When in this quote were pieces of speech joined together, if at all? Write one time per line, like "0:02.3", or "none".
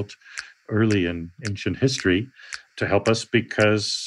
0:01.4